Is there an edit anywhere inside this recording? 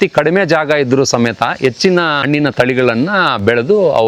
yes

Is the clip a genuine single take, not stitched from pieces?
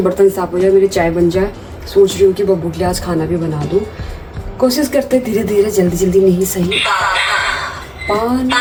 yes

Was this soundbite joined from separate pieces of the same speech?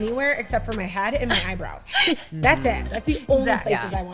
no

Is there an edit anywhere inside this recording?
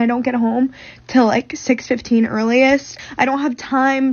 yes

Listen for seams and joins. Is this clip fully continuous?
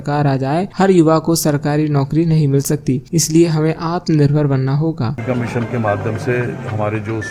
yes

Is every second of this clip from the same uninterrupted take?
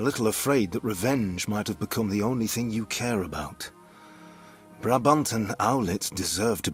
yes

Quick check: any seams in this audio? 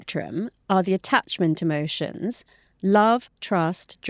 no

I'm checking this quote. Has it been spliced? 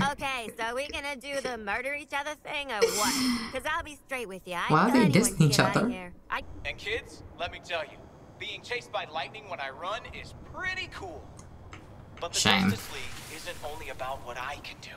yes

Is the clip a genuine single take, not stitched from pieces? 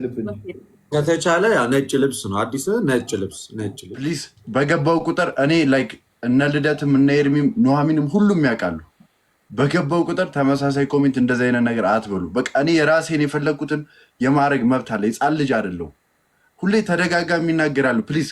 no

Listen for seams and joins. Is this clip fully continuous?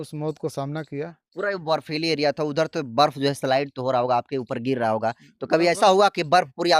yes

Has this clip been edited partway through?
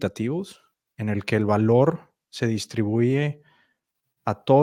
no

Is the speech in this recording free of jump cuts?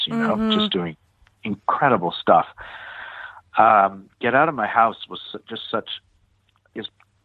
yes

